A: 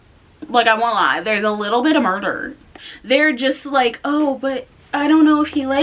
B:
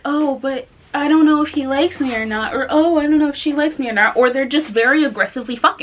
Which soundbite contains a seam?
A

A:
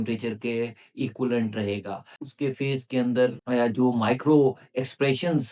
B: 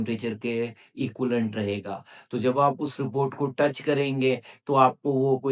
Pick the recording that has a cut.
A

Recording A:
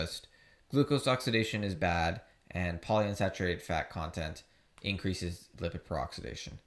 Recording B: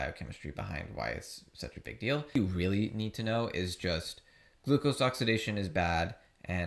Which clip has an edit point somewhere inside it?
B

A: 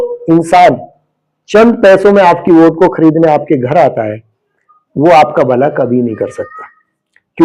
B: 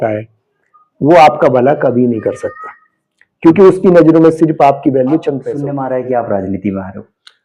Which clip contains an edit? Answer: B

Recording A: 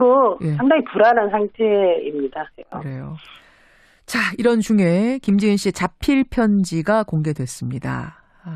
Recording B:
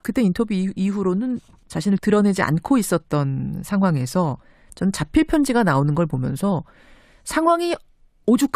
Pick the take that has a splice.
A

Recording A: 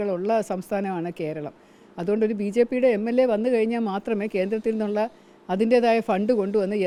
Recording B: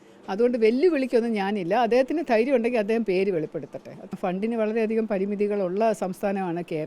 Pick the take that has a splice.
B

